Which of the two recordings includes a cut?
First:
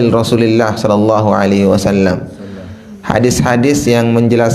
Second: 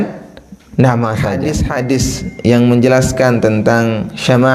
second; 1 cut; at 1.5 s

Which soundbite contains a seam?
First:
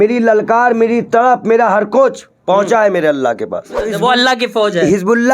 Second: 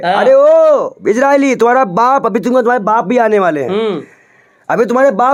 first; 1 cut; at 3.9 s

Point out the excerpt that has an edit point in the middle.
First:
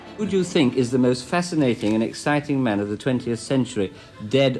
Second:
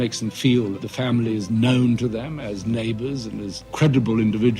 second; 2 cuts; at 0.8 s, 3.6 s

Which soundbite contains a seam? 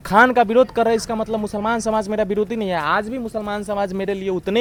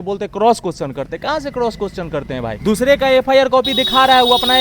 second; 1 cut; at 2.6 s

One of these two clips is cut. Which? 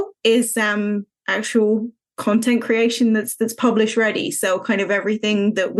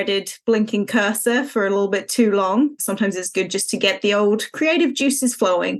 second; 1 cut; at 2.8 s

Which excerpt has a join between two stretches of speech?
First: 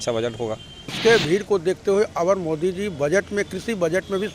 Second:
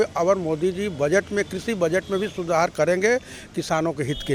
first; 1 cut; at 1.0 s

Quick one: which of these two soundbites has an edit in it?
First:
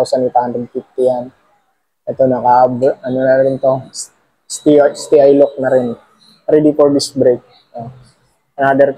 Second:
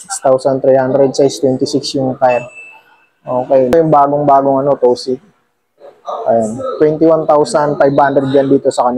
second; 1 cut; at 3.7 s

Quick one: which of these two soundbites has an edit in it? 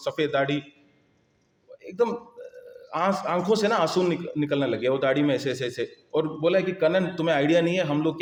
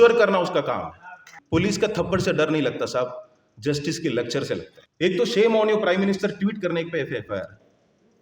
second; 2 cuts; at 1.3 s, 4.8 s

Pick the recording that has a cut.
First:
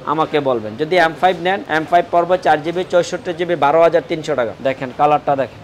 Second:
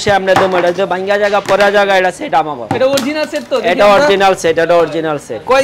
first; 2 cuts; at 1.6 s, 4.5 s

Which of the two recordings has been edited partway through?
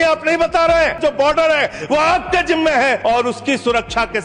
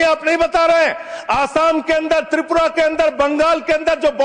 first; 2 cuts; at 1.0 s, 3.0 s

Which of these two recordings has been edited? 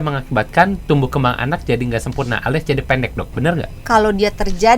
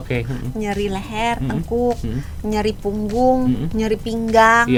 first; 1 cut; at 3.8 s

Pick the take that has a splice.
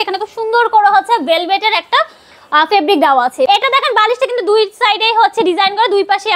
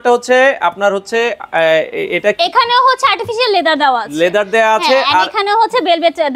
first; 1 cut; at 3.5 s

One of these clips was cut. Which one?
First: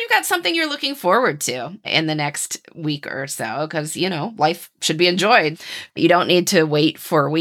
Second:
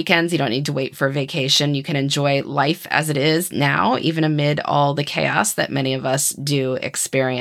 first; 2 cuts; at 1.9 s, 5.6 s

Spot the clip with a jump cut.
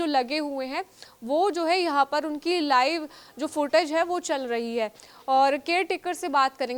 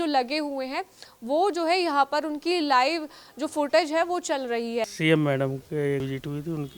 second; 1 cut; at 4.9 s

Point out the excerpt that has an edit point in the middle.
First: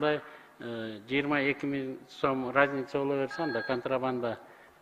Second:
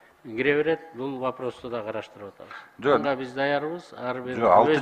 second; 1 cut; at 3.0 s

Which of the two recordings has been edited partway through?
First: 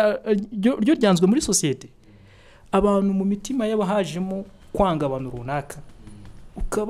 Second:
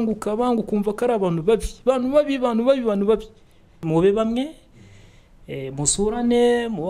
second; 1 cut; at 3.8 s

